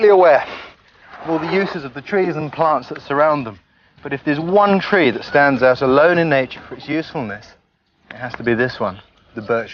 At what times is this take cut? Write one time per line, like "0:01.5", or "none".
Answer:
none